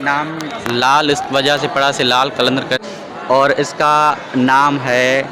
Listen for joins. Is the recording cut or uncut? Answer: cut